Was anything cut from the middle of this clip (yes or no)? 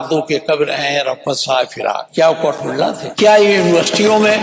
yes